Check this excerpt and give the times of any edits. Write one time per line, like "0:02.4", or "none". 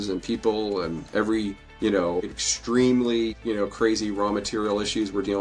0:01.6
0:02.4
0:03.4